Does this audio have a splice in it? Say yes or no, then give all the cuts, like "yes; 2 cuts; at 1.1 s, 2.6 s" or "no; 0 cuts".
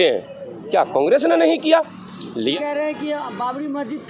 yes; 1 cut; at 2.5 s